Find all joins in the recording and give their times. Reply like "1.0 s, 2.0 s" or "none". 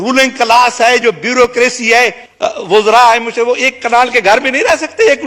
2.2 s